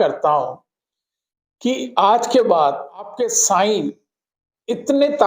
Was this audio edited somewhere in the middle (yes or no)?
yes